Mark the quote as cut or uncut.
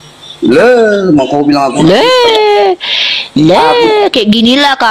uncut